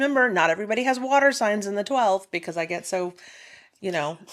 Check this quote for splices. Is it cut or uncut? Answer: uncut